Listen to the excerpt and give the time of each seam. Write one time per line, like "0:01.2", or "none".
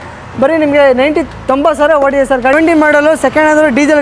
0:02.5